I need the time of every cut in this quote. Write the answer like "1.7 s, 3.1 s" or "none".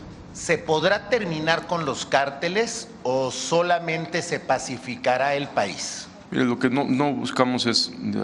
none